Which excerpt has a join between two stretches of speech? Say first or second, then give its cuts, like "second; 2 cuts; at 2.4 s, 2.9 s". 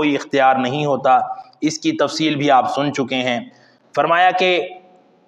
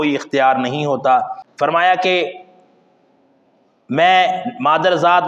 second; 1 cut; at 1.4 s